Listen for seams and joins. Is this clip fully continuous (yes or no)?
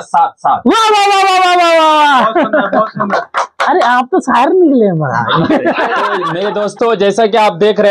no